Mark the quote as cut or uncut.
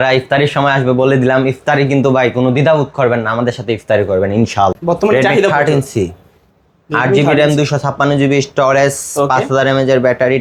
cut